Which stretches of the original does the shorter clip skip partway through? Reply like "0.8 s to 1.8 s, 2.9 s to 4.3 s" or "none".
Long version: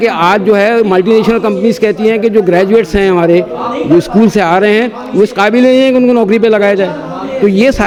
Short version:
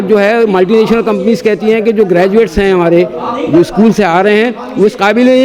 none